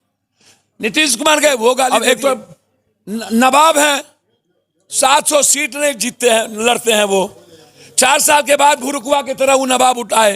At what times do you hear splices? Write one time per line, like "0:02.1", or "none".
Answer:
0:01.9